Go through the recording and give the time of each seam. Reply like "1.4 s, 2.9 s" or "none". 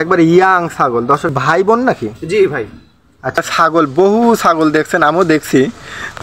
1.3 s, 3.4 s